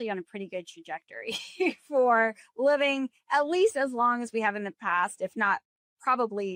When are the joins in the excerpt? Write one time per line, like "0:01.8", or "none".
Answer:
none